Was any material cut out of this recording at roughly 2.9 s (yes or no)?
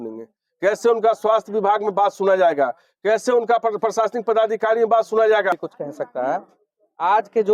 no